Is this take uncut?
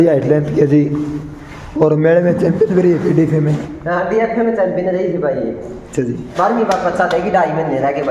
no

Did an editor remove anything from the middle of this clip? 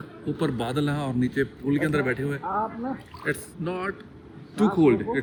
no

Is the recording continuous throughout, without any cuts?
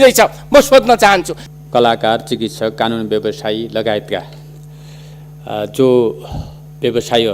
no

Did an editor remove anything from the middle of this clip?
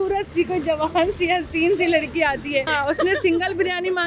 yes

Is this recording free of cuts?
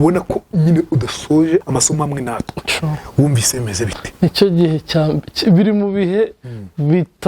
no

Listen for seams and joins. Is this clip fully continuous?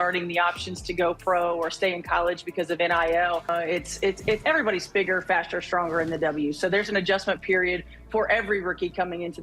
yes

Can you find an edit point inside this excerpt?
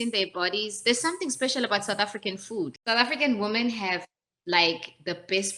yes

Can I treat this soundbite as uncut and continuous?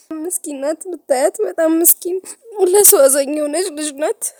yes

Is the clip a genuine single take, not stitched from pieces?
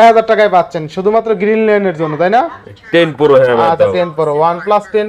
yes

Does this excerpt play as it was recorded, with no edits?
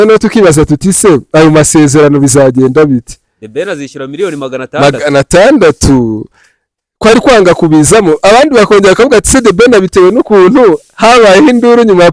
yes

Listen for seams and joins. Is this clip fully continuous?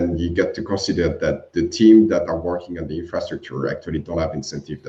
yes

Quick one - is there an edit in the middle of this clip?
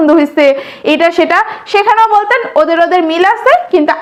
no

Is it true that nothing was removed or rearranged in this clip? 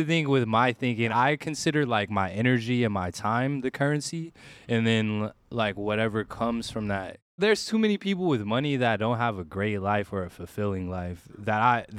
no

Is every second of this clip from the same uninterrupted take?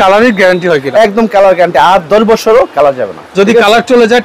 yes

